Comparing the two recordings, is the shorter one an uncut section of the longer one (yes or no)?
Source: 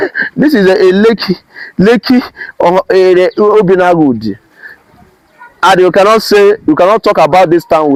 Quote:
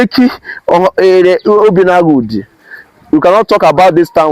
no